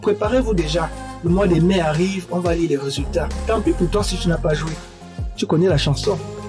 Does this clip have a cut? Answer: no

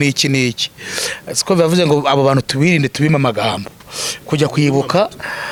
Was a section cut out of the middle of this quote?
no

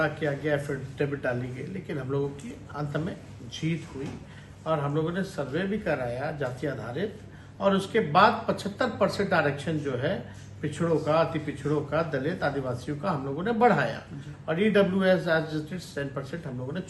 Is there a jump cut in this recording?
no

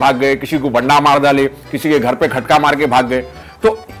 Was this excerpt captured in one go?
yes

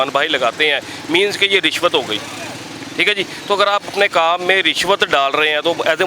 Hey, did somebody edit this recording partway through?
no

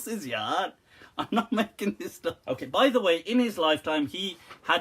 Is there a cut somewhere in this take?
yes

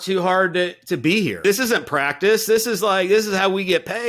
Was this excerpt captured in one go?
no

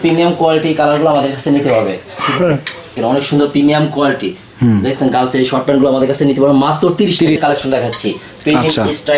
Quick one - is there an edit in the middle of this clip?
yes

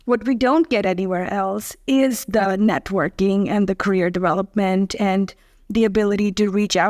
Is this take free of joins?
yes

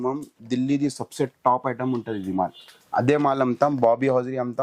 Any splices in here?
no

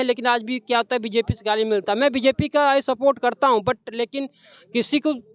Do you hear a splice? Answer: no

